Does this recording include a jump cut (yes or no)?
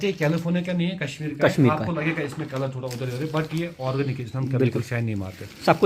no